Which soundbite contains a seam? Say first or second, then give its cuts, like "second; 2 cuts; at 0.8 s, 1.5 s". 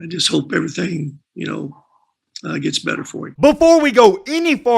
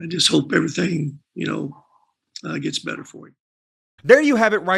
first; 1 cut; at 3.2 s